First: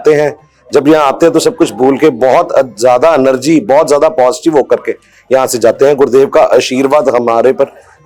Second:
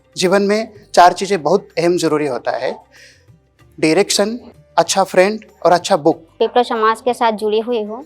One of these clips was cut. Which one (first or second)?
second